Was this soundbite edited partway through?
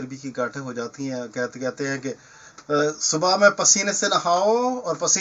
no; 0 cuts

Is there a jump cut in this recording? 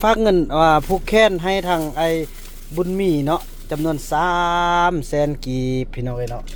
no; 0 cuts

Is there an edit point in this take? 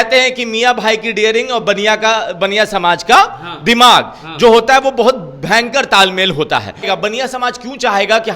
yes; 1 cut; at 6.9 s

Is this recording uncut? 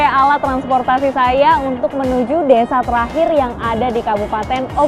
yes; 0 cuts

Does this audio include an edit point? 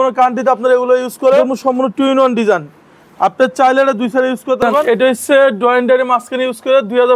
yes; 2 cuts; at 1.5 s, 4.8 s

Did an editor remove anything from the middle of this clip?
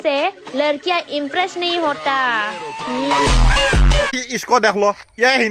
yes; 1 cut; at 4.2 s

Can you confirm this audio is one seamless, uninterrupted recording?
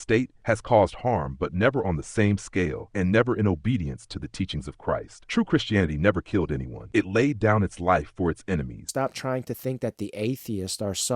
no; 1 cut; at 8.9 s

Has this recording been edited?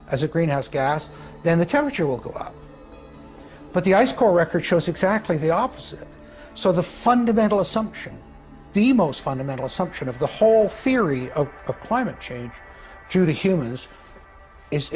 no; 0 cuts

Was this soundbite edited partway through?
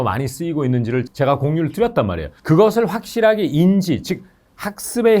yes; 2 cuts; at 1.1 s, 2.3 s

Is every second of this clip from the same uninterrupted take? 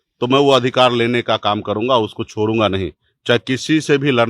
yes; 0 cuts

